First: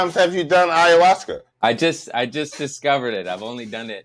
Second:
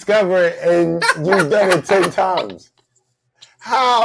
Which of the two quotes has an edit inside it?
first; 1 cut; at 1.5 s

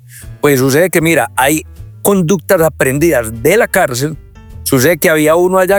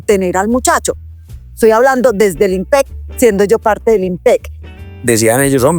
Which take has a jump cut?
second; 1 cut; at 4.6 s

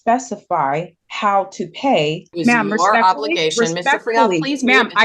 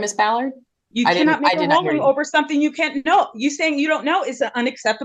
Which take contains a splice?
first; 2 cuts; at 1.0 s, 2.3 s

